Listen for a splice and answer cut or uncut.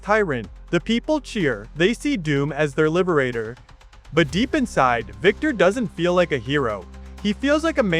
uncut